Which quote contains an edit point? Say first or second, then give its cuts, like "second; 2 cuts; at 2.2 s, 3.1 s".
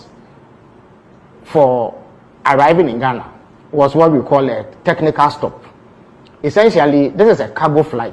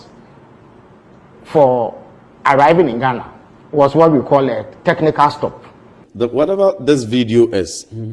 second; 1 cut; at 6.0 s